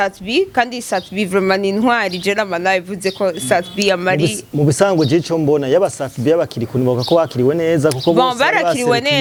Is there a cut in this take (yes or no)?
no